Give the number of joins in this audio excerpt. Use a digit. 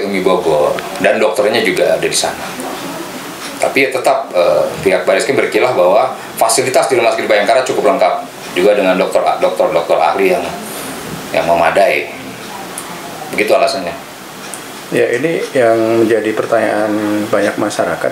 0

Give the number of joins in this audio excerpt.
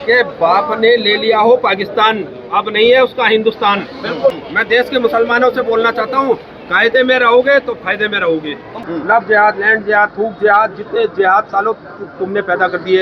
2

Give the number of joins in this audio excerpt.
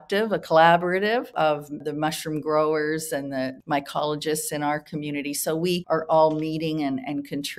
3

